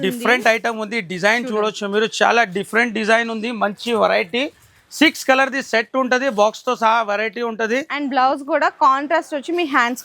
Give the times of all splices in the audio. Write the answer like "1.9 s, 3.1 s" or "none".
none